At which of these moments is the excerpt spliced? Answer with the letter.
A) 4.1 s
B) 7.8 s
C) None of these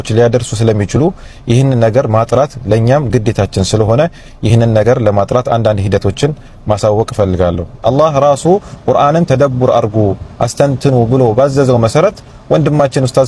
B